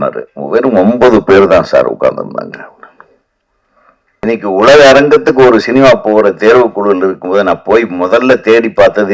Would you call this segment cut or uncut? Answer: cut